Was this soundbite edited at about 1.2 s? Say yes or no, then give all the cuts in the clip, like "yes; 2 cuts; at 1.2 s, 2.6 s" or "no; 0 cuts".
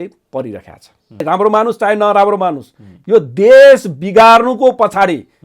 yes; 1 cut; at 1.2 s